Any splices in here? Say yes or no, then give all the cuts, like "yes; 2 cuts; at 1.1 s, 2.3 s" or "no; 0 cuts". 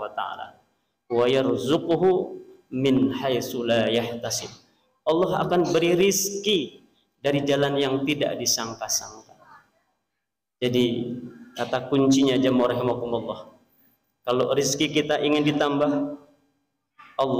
no; 0 cuts